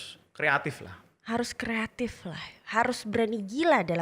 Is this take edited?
no; 0 cuts

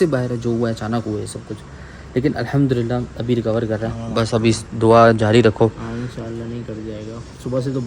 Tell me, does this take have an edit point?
no; 0 cuts

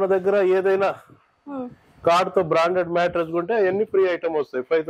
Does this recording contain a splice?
no; 0 cuts

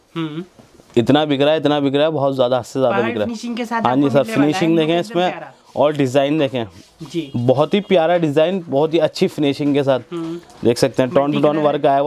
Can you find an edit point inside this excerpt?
no; 0 cuts

